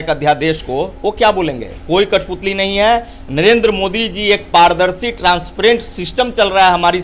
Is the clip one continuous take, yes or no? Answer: yes